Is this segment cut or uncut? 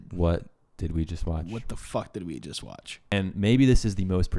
cut